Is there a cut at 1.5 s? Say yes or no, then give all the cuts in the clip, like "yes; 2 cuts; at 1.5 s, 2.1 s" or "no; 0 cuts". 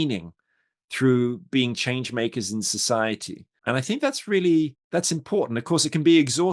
no; 2 cuts; at 3.5 s, 4.8 s